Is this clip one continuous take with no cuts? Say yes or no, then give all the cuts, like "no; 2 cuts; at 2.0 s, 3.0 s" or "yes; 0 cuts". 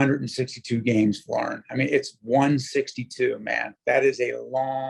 yes; 0 cuts